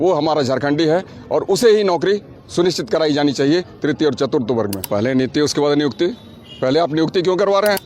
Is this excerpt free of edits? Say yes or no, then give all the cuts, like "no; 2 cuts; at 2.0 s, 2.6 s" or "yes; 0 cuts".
no; 1 cut; at 4.8 s